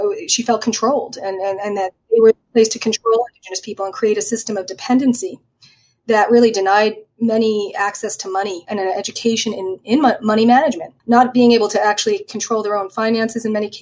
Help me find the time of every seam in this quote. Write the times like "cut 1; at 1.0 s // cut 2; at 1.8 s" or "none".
cut 1; at 8.6 s // cut 2; at 10.9 s